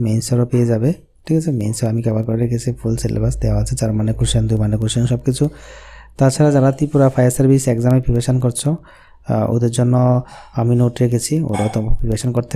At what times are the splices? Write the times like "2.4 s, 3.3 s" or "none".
none